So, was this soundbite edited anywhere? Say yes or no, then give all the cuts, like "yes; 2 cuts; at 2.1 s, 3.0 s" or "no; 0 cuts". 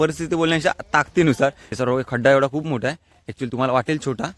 yes; 1 cut; at 1.6 s